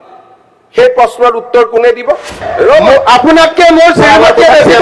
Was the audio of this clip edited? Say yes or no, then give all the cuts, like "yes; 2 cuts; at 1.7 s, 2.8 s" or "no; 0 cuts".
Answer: yes; 1 cut; at 2.4 s